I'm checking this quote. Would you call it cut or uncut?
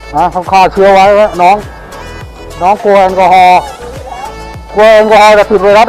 uncut